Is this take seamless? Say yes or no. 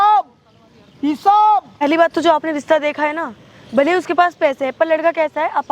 no